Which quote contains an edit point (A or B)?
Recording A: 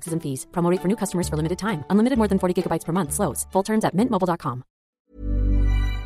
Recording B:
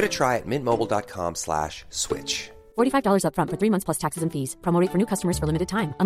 A